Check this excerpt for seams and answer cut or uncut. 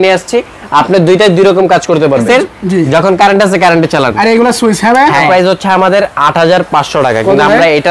cut